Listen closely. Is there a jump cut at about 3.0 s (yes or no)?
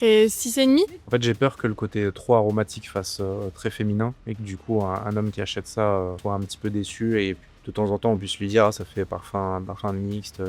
no